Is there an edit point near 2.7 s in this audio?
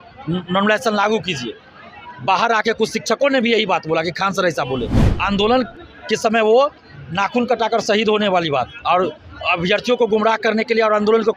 no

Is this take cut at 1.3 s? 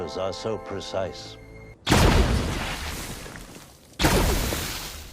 yes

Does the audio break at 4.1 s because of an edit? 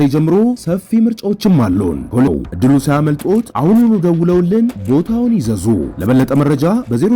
no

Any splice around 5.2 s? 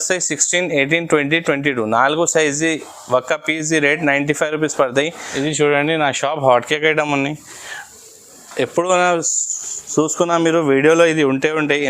yes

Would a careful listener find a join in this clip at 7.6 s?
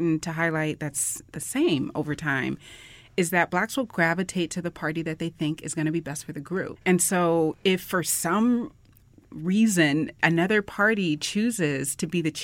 yes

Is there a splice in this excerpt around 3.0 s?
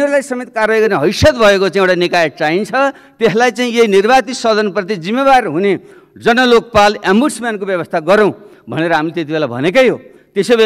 no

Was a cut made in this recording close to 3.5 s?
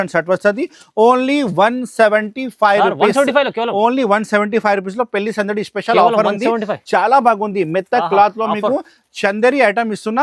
no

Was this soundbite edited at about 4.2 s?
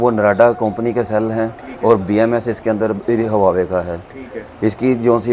no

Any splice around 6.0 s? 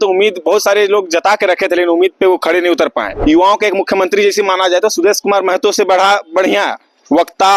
no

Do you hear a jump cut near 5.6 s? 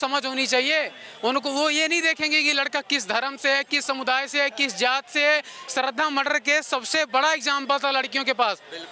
yes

